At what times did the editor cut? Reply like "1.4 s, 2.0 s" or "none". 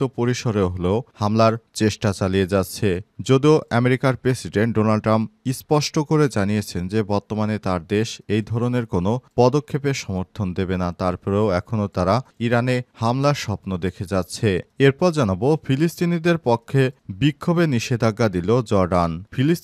none